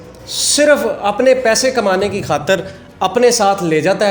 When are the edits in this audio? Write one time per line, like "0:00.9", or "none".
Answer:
none